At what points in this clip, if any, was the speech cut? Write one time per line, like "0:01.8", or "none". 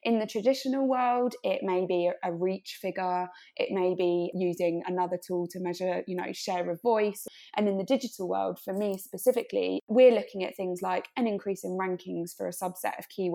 0:04.3
0:07.2
0:09.8